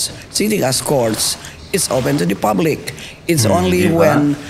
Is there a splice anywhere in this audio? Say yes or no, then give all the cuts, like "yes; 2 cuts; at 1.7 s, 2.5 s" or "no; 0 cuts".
no; 0 cuts